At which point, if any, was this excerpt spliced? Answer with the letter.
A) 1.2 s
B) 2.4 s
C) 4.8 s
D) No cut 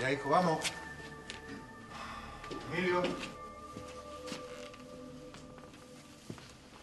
D